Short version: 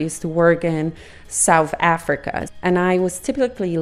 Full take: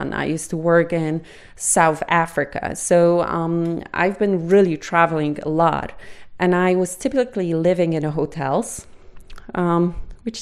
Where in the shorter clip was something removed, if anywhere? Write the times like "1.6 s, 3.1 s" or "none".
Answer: 2.4 s